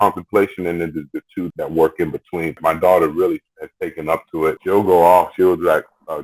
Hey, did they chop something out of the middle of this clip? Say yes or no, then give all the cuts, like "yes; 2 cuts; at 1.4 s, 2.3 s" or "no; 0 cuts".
yes; 3 cuts; at 1.5 s, 2.6 s, 4.6 s